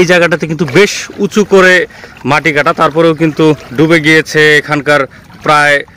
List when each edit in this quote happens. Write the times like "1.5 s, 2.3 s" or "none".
3.7 s

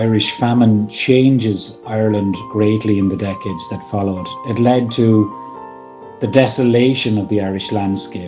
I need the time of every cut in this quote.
none

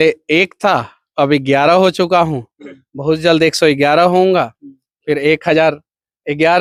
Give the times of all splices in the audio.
none

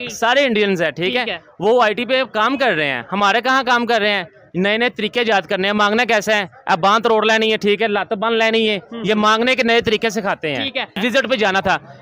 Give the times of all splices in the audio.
11.0 s

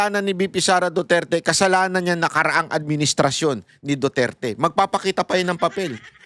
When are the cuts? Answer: none

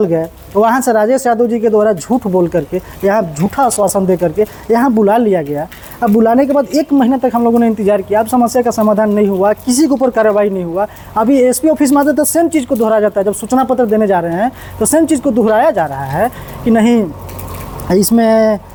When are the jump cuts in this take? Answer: none

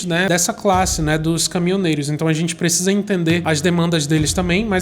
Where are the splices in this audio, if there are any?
3.4 s

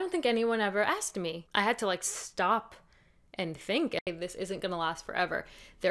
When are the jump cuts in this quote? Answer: 1.4 s, 4.0 s

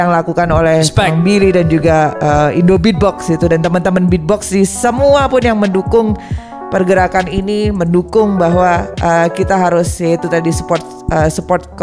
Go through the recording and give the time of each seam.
none

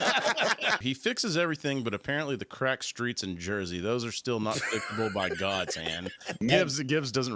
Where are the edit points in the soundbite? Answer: 0.8 s, 6.4 s

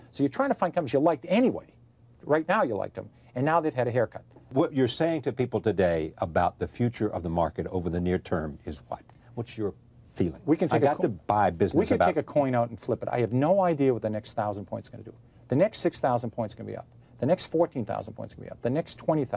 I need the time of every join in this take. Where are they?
4.5 s

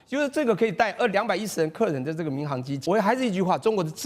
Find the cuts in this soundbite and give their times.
2.8 s

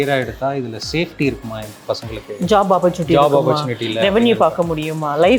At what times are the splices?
none

